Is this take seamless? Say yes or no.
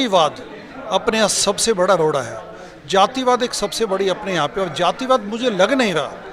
yes